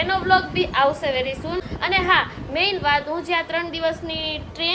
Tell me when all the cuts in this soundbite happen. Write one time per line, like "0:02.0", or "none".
0:01.6

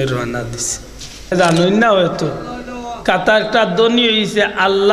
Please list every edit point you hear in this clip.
0:01.3

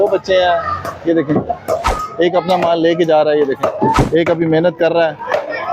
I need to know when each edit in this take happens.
0:02.0
0:04.0

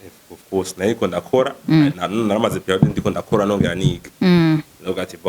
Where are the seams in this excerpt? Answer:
none

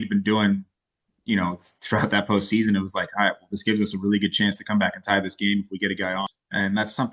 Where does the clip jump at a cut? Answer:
0:06.2

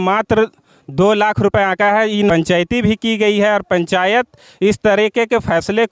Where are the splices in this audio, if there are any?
0:02.3

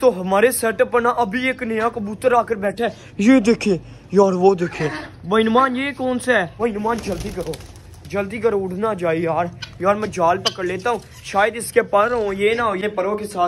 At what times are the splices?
0:06.5

